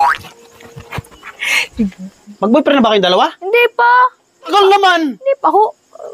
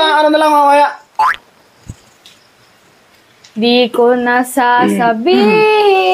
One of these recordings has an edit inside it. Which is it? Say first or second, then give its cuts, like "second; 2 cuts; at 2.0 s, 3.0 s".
first; 2 cuts; at 2.2 s, 4.5 s